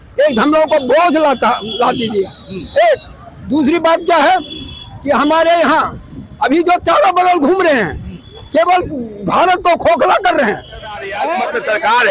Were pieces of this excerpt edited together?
yes; 1 cut; at 11.2 s

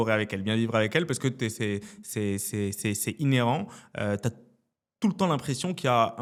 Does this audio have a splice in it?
no; 0 cuts

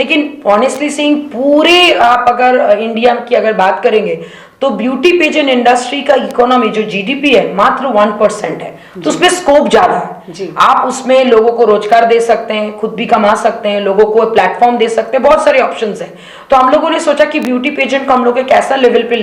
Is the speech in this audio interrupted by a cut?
no; 0 cuts

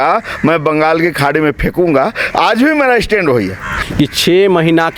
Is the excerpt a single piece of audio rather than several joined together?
no; 1 cut; at 3.8 s

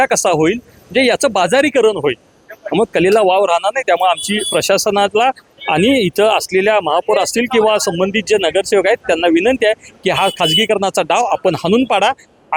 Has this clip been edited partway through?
no; 0 cuts

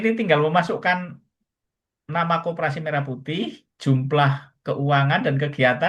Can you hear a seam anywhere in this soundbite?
no; 0 cuts

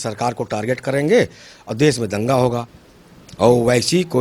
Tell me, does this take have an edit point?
yes; 1 cut; at 2.8 s

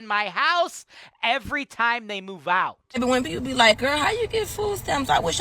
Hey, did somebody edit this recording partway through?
yes; 1 cut; at 2.8 s

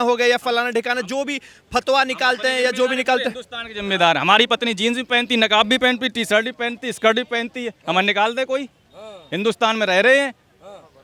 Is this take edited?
no; 0 cuts

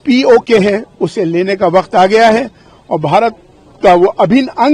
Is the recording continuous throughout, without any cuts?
yes; 0 cuts

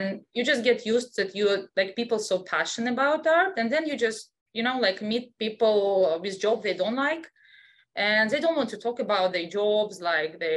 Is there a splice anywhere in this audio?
no; 0 cuts

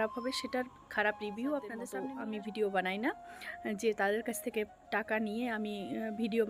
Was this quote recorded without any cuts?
no; 1 cut; at 1.9 s

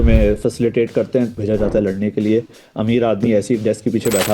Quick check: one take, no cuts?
no; 1 cut; at 1.3 s

